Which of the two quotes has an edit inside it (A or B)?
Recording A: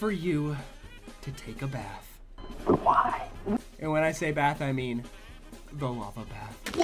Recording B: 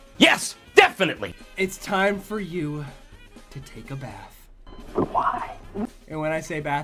B